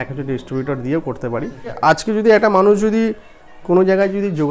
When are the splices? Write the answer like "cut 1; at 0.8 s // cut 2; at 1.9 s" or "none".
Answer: cut 1; at 1.6 s